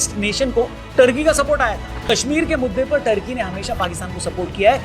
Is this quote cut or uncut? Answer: cut